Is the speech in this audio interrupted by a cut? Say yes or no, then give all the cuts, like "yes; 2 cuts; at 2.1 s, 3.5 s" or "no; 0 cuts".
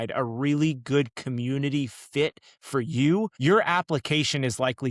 yes; 1 cut; at 3.3 s